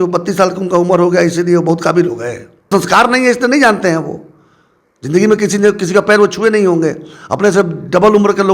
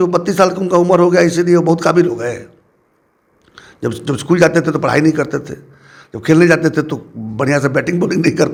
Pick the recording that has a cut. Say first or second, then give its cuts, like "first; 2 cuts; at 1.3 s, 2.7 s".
first; 1 cut; at 2.7 s